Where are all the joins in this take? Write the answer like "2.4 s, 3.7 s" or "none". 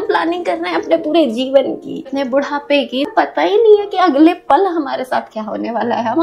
none